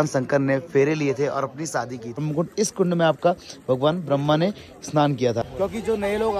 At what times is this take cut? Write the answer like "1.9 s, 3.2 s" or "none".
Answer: 2.2 s, 5.5 s

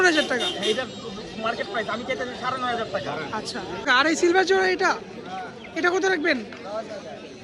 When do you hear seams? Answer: 3.8 s

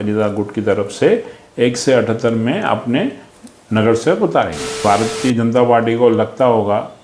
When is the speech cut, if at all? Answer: 4.8 s

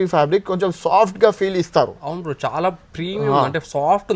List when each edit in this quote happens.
none

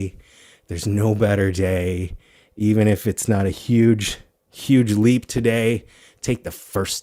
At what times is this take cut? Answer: none

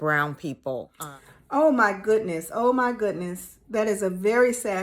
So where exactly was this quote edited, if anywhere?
1.0 s

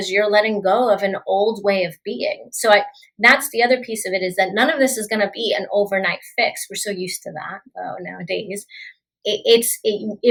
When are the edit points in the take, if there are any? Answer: none

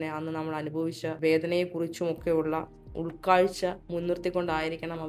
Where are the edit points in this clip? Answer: 1.2 s, 3.8 s

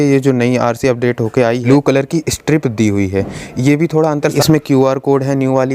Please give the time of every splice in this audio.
1.6 s, 4.4 s

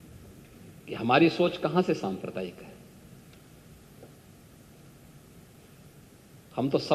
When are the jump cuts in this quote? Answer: none

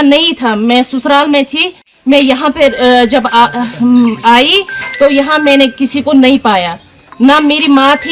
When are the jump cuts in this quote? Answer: 1.8 s

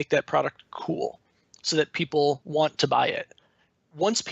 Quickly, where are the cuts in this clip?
2.4 s

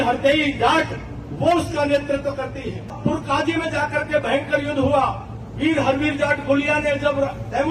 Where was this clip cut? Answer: 2.9 s

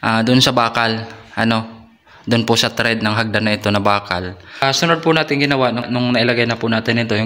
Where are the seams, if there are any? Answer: 4.6 s, 5.9 s

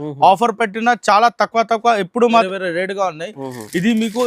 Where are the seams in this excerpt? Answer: 2.3 s

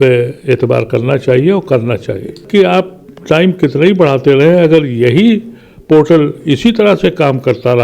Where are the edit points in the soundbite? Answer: 2.4 s

